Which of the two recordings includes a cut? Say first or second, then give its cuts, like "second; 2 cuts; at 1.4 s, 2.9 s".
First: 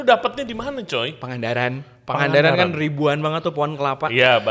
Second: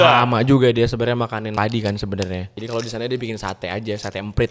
second; 2 cuts; at 1.5 s, 2.5 s